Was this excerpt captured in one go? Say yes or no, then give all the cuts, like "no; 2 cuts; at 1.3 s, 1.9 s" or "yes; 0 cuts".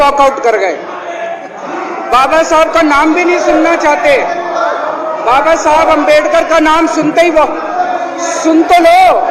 yes; 0 cuts